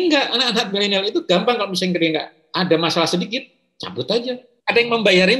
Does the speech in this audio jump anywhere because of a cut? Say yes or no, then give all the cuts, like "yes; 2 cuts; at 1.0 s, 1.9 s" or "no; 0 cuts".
yes; 1 cut; at 4.5 s